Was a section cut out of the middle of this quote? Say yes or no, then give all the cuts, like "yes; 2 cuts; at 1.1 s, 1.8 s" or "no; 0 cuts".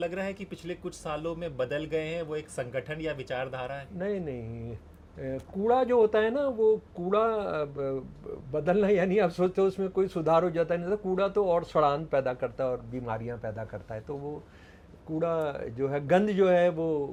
no; 0 cuts